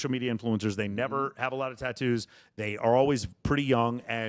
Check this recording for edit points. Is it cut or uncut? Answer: uncut